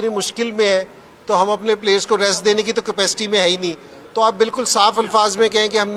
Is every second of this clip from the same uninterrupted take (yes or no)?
yes